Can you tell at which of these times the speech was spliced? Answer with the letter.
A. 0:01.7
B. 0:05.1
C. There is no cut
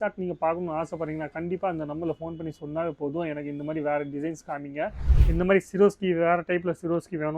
B